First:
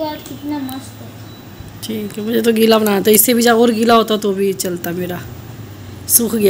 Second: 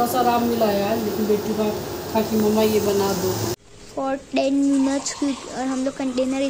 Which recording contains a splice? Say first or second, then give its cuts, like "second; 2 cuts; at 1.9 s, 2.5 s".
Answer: second; 1 cut; at 3.6 s